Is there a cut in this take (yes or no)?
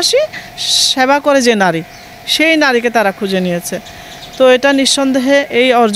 no